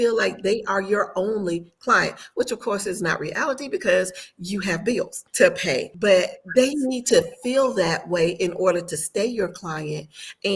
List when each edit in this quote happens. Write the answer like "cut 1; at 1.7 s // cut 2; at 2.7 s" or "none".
cut 1; at 5.2 s // cut 2; at 5.9 s

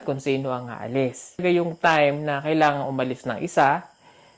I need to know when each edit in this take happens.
cut 1; at 1.4 s

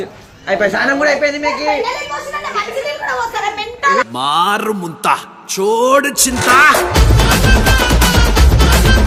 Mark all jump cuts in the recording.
none

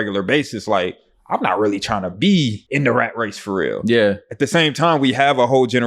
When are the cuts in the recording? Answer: cut 1; at 2.6 s

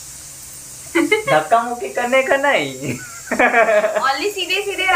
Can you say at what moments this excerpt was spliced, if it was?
none

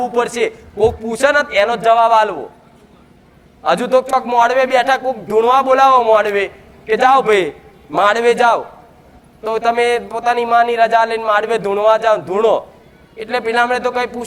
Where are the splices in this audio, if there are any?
none

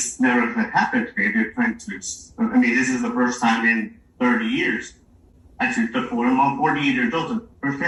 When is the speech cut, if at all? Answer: none

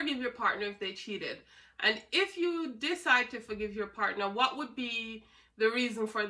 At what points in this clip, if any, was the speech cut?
none

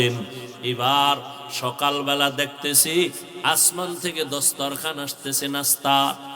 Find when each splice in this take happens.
none

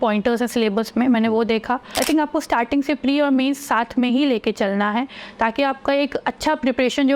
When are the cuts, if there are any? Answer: cut 1; at 2.0 s

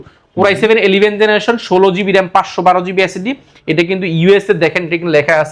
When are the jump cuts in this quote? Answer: none

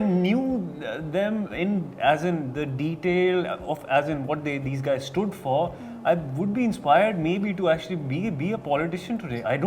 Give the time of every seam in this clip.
none

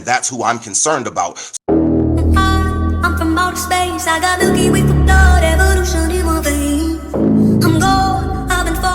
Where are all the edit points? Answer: cut 1; at 1.4 s

